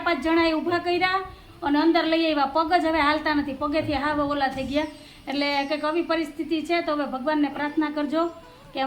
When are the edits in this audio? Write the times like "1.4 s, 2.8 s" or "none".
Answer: none